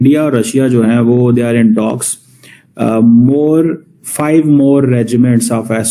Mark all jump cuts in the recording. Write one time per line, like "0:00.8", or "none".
none